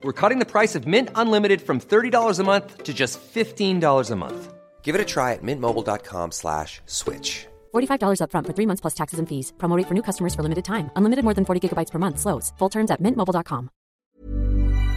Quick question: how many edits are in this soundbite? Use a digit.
1